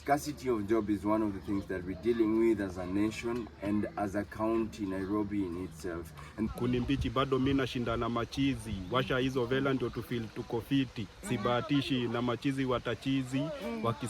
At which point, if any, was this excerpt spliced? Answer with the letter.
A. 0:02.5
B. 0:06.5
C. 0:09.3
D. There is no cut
B